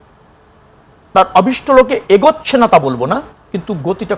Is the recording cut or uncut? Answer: uncut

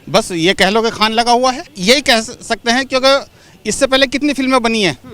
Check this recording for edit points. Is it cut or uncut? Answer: cut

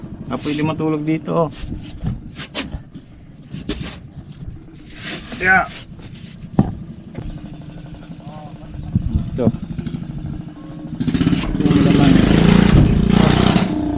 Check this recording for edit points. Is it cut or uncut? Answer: cut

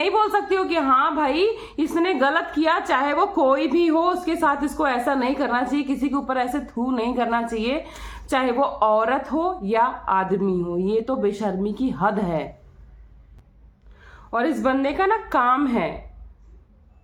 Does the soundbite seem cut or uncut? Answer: uncut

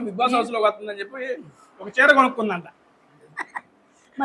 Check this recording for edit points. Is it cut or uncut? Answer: uncut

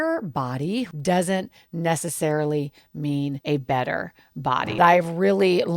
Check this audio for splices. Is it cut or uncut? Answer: cut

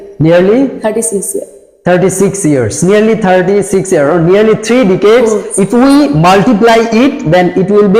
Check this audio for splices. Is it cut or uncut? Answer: uncut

